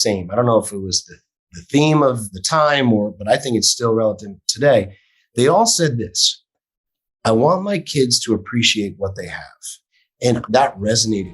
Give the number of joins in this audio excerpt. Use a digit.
1